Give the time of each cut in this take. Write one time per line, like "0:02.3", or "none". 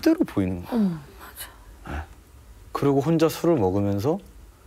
none